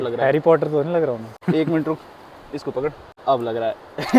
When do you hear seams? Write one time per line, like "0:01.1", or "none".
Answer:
0:01.3
0:03.1

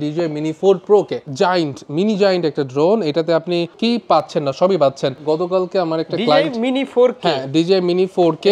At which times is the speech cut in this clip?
0:01.2
0:03.7
0:05.2

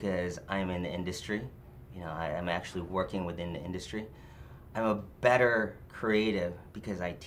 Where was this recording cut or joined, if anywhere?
none

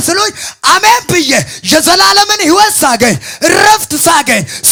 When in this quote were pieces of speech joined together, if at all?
none

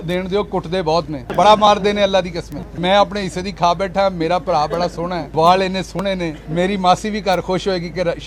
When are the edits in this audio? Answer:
0:01.3
0:02.6
0:05.2
0:06.4

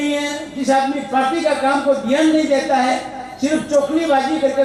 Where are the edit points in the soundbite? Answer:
none

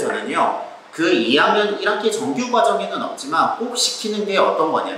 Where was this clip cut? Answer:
none

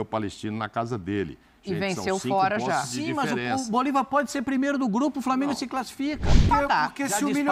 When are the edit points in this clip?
0:06.4

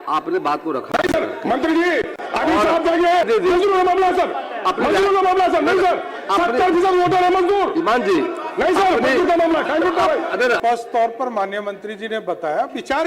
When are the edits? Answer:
0:03.2
0:10.6

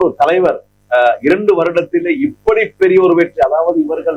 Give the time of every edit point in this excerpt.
none

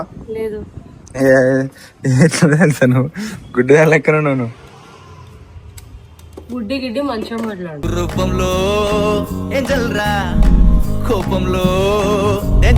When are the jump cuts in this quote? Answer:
none

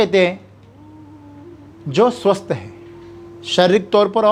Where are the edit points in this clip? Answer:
none

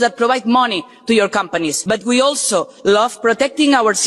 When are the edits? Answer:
none

